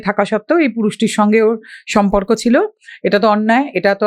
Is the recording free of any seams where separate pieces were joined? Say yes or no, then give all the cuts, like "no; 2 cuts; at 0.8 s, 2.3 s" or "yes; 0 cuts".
yes; 0 cuts